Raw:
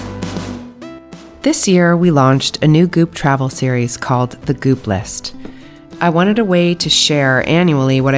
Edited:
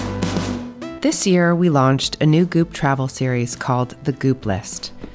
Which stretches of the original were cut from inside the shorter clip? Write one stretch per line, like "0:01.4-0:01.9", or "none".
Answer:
0:00.9-0:01.3